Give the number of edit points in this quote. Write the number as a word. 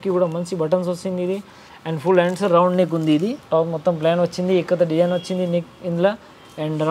one